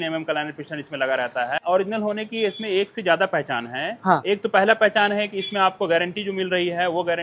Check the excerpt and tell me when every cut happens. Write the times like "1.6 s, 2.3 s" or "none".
1.6 s